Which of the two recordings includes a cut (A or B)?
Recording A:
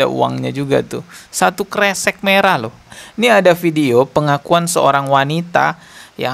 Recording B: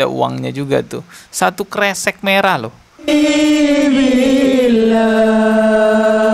A